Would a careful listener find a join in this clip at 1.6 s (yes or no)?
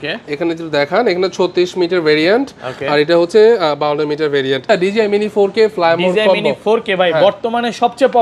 no